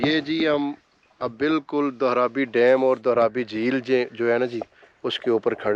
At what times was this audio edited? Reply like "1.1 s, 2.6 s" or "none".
none